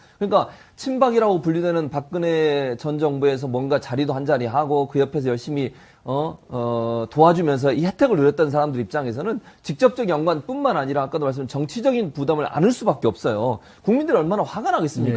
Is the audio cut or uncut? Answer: cut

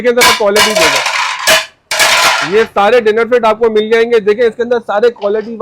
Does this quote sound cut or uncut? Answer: uncut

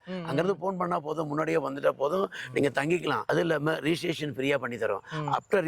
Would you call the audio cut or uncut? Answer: cut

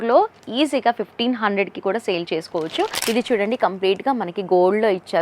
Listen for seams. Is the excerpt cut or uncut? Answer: cut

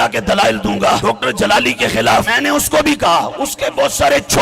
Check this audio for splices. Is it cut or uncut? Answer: cut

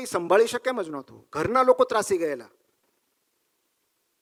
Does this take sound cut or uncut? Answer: uncut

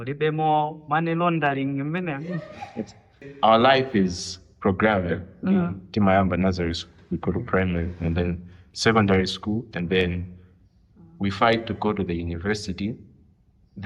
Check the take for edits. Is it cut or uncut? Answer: cut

